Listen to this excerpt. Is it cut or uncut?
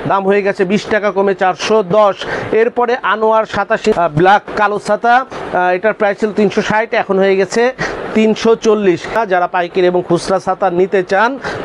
cut